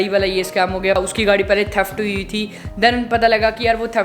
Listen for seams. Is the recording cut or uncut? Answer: cut